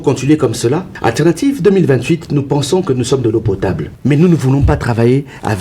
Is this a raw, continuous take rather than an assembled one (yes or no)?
no